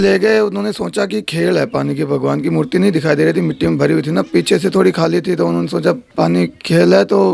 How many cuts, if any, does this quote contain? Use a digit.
1